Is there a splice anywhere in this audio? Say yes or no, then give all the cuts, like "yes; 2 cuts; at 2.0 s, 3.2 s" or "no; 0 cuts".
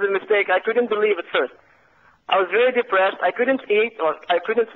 no; 0 cuts